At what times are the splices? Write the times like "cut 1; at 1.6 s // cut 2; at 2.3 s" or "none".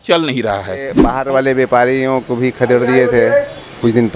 cut 1; at 1.1 s